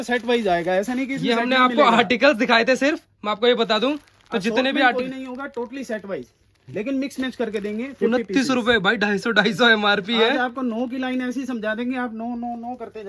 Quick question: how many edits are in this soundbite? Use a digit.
0